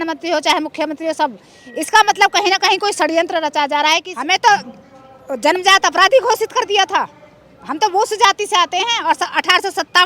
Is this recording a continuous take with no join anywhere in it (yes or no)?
no